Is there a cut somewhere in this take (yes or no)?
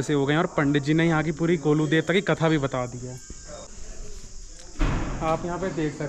yes